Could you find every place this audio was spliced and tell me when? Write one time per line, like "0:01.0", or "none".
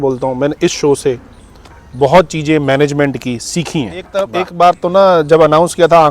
0:04.2